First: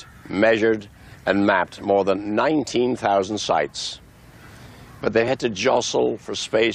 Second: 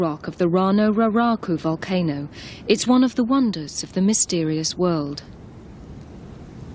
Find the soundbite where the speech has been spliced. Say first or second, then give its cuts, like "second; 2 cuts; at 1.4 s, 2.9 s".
second; 1 cut; at 4.6 s